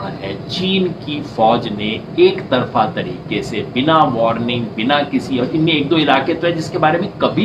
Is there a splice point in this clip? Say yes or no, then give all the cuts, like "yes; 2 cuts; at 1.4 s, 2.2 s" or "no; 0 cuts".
no; 0 cuts